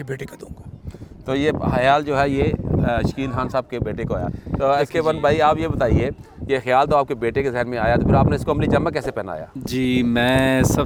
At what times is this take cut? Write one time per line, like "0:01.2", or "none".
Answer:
none